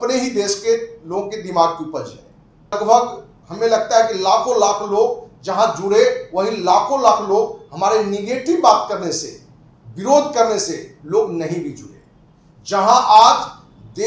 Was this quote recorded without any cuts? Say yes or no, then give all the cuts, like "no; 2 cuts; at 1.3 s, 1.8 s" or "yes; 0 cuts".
no; 1 cut; at 2.7 s